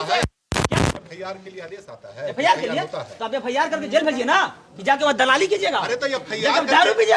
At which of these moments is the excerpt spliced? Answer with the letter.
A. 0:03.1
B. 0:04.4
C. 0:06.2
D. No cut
D